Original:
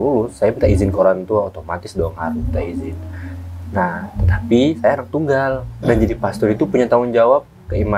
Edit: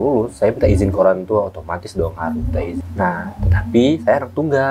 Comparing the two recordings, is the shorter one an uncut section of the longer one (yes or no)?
no